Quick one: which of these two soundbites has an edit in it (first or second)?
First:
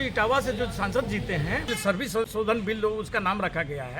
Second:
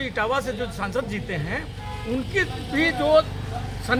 first